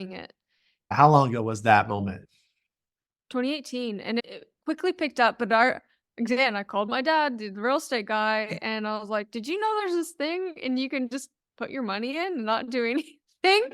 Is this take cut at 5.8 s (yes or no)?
no